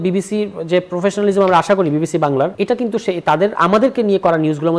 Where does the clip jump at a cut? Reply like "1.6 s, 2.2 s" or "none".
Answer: 2.6 s